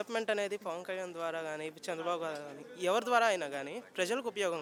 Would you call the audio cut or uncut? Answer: uncut